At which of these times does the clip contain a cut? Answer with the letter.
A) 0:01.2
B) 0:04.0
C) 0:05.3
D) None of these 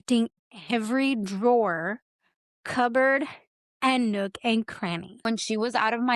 C